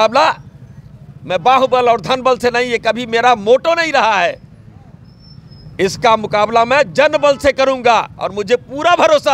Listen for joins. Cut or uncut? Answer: uncut